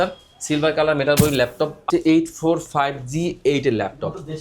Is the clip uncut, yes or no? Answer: no